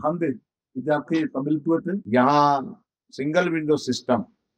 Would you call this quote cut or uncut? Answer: cut